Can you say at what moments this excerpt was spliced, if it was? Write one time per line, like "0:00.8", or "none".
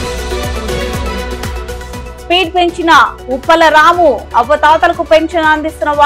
0:02.1